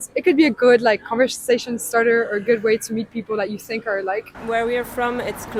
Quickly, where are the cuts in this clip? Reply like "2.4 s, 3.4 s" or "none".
none